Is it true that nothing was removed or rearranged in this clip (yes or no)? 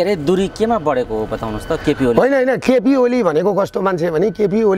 yes